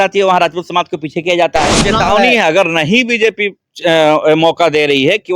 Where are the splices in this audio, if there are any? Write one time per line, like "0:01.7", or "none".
0:01.9